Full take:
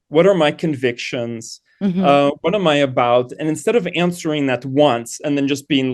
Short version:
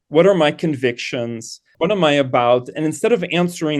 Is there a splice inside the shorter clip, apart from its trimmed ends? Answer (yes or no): yes